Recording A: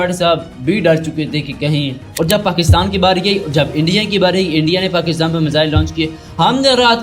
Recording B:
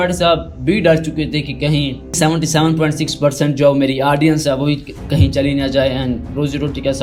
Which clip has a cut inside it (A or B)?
A